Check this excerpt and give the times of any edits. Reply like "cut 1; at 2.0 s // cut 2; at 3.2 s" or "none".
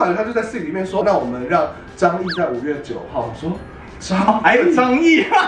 cut 1; at 1.0 s